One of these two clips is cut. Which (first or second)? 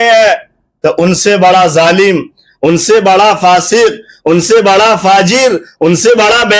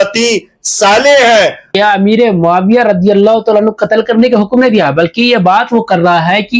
second